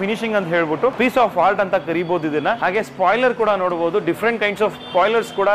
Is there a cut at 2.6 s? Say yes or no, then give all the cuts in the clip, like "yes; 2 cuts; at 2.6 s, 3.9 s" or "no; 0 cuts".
yes; 2 cuts; at 0.9 s, 2.6 s